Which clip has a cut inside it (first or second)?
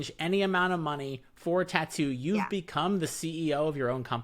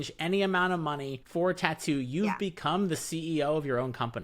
second